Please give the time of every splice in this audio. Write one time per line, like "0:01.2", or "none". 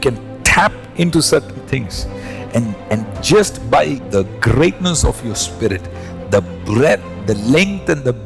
0:04.0

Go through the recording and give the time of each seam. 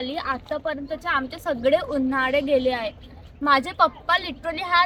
none

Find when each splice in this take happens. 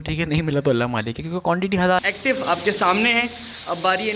0:02.0

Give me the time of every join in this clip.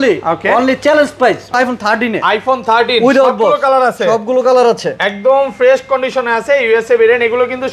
0:01.6

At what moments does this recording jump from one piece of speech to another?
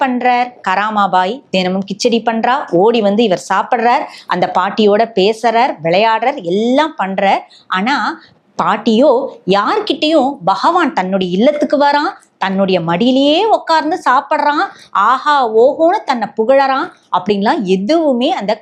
none

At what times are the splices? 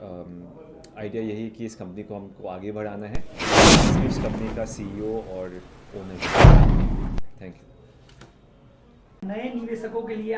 0:03.3
0:04.3
0:06.2
0:07.2
0:09.2

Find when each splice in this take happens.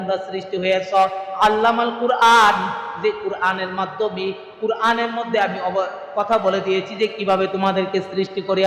none

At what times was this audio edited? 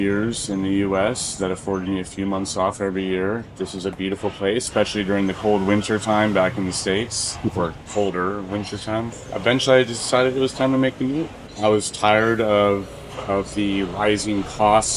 0:04.7
0:11.4

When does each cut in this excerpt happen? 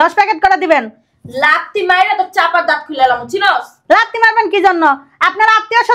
none

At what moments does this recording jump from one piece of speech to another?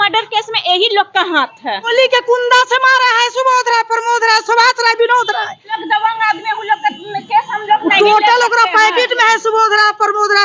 0:01.9
0:05.8

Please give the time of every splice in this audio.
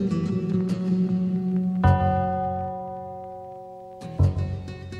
none

